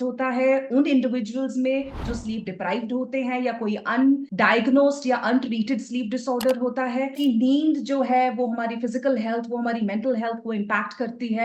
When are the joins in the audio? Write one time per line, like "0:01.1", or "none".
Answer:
0:04.3
0:07.1